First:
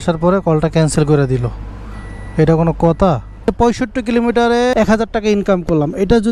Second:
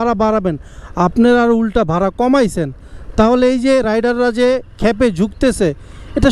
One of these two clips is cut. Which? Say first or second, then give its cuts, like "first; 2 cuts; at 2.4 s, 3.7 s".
first; 2 cuts; at 3.5 s, 4.7 s